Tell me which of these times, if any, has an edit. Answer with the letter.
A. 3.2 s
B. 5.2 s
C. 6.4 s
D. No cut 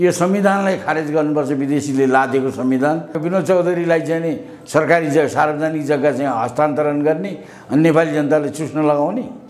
A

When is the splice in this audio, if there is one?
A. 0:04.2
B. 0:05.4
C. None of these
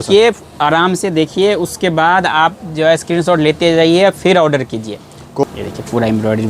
B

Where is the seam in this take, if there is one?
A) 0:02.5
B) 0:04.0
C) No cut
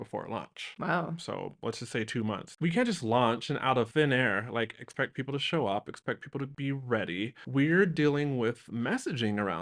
A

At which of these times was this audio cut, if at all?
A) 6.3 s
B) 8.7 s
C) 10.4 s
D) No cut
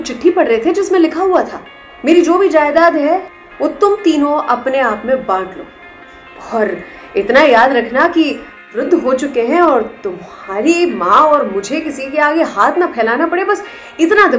B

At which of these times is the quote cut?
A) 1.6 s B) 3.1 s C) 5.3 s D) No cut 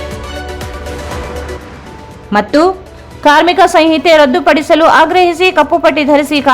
D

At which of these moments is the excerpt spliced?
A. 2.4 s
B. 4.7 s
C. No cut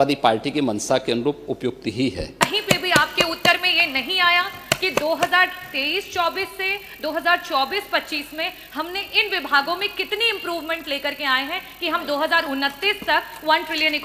A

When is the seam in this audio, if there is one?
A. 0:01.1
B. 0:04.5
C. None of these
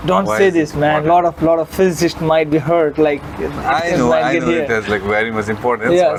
C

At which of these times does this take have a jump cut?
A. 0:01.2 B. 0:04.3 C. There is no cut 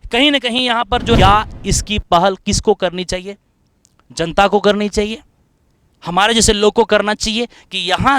A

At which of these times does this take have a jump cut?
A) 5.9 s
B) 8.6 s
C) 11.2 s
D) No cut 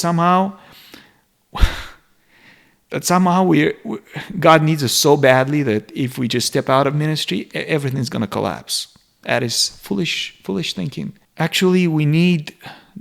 C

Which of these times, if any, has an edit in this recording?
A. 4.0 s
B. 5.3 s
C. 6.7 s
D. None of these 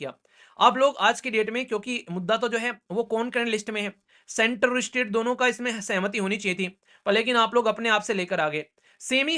D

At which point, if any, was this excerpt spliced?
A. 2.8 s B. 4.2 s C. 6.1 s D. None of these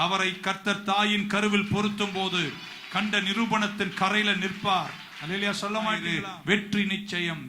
C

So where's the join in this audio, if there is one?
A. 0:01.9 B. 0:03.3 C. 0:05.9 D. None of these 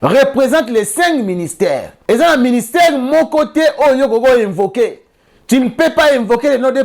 A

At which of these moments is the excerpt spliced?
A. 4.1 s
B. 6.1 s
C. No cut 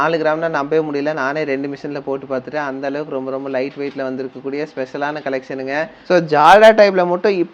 B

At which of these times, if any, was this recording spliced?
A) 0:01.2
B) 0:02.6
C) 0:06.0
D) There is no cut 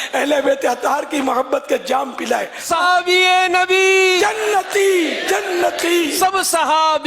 B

